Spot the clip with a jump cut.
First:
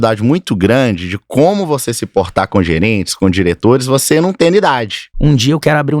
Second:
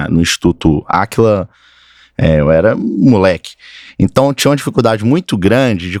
first; 1 cut; at 5.0 s

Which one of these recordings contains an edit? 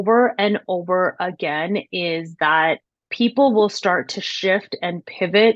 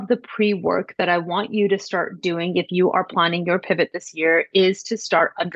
first; 1 cut; at 3.0 s

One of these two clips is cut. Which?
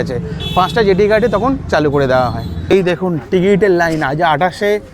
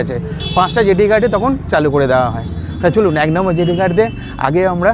first; 1 cut; at 2.5 s

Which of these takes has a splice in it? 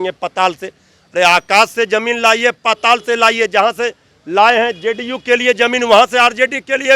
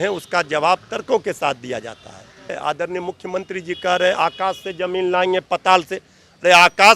second; 1 cut; at 2.5 s

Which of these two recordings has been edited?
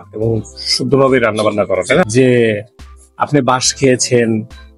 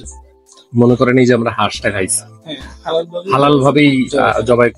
first; 1 cut; at 2.1 s

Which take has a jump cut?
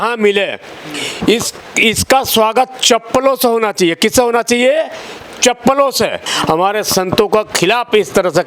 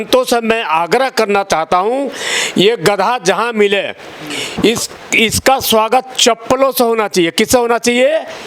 first; 1 cut; at 6.3 s

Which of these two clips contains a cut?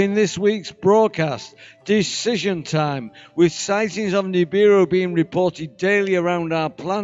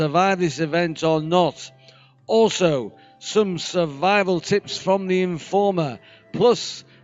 second; 1 cut; at 1.4 s

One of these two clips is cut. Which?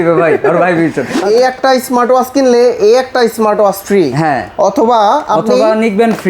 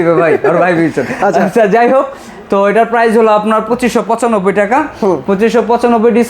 first; 1 cut; at 1.1 s

